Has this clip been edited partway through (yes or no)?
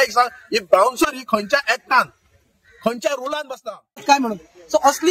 yes